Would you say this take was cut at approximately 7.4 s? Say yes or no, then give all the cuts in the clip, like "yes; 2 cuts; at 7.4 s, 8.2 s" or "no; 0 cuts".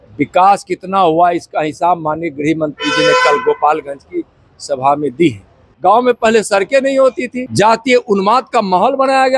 yes; 2 cuts; at 5.6 s, 7.4 s